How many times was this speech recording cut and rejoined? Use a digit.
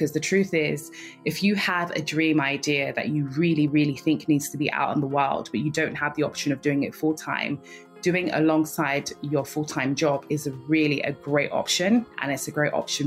1